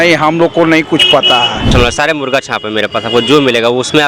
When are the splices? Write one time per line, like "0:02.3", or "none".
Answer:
0:01.7